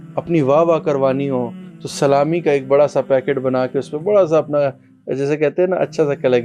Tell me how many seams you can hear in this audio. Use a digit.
0